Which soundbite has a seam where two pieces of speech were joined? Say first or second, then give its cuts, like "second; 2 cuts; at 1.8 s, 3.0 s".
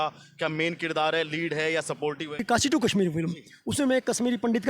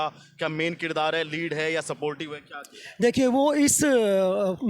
first; 1 cut; at 2.4 s